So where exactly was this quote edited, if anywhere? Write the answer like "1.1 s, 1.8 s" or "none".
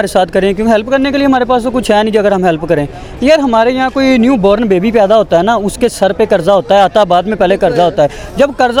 none